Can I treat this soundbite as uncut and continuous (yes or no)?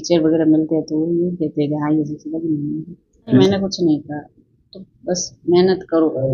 no